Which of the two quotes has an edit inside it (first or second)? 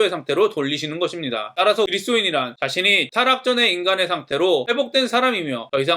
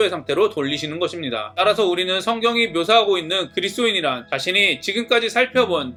first